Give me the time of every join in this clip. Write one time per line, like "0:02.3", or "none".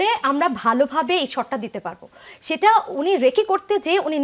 none